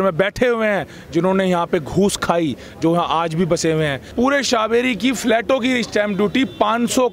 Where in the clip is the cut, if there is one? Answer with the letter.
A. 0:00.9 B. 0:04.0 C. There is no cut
B